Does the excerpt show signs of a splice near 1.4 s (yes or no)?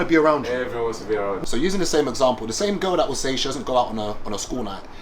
yes